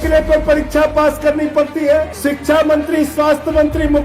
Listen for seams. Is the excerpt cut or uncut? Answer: cut